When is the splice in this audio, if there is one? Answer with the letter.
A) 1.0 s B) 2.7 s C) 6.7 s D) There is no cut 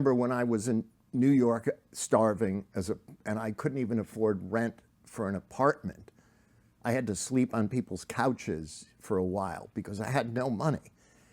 A